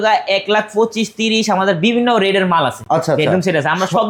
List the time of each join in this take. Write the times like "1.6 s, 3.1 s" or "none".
none